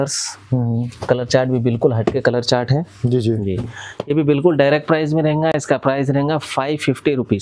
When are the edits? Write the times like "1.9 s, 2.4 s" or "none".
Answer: none